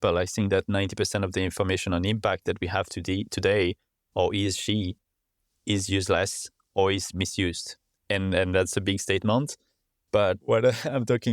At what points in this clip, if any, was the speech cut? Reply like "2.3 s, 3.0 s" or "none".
10.4 s